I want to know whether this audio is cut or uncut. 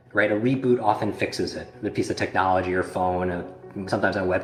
uncut